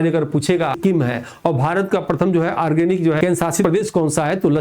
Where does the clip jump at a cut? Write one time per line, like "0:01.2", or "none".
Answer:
0:00.8
0:03.6